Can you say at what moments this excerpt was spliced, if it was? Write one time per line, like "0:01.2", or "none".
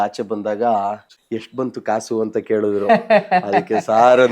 0:01.1